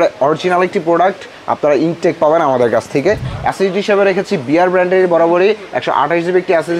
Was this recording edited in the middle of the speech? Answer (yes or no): yes